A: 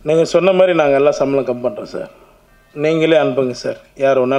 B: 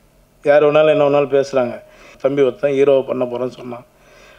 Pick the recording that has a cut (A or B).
B